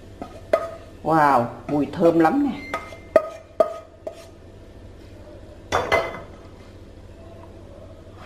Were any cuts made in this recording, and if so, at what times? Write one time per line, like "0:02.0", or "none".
none